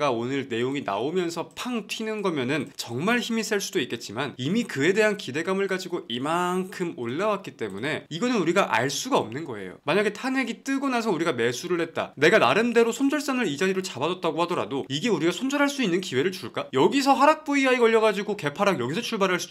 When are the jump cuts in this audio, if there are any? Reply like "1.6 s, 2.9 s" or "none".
none